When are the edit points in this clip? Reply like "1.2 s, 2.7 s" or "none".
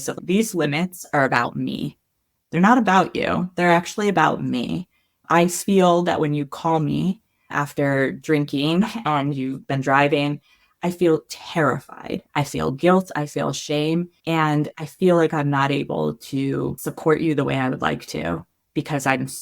12.2 s, 14.1 s, 16.9 s